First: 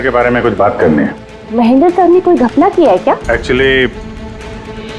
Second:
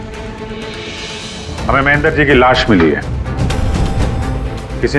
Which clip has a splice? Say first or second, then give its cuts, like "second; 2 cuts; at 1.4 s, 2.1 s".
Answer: first; 2 cuts; at 1.3 s, 3.2 s